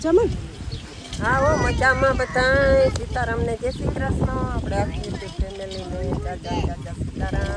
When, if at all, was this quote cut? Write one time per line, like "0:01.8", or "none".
none